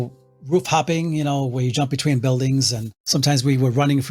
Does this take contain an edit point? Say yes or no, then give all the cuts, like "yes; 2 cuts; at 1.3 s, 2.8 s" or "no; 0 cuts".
yes; 1 cut; at 3.0 s